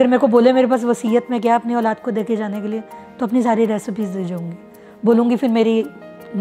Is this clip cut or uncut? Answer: uncut